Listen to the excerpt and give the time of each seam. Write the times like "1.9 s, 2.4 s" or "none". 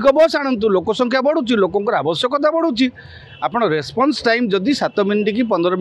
none